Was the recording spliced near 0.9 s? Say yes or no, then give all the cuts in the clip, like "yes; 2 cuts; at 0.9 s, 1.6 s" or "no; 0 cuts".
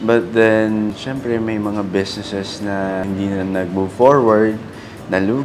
yes; 2 cuts; at 0.9 s, 3.0 s